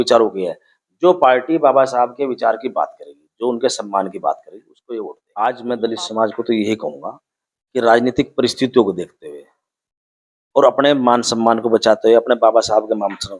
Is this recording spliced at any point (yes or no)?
yes